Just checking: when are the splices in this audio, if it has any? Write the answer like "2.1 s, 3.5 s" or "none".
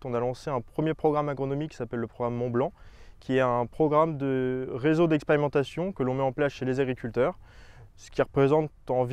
none